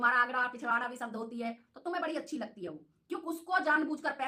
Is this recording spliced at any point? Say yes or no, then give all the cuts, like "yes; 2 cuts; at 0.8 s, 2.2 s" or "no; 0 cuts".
no; 0 cuts